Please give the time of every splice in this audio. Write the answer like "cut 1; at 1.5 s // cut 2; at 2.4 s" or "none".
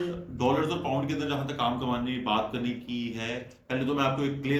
none